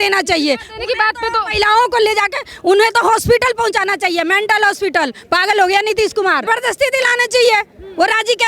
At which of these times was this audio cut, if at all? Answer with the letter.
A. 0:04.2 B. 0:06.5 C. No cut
B